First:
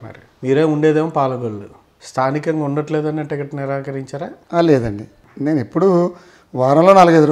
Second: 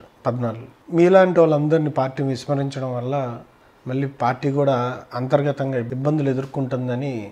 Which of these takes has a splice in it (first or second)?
second